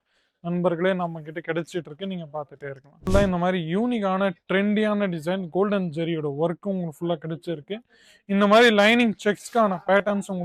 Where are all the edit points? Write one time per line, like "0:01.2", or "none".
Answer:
0:02.9